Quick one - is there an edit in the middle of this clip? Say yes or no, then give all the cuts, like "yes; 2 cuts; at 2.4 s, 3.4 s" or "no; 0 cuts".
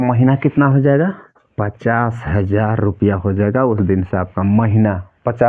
no; 0 cuts